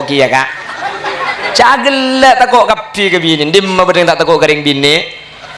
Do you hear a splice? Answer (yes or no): no